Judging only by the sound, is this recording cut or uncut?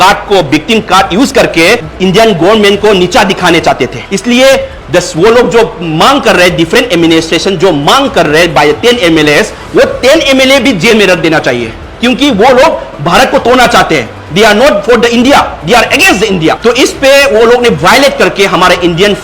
cut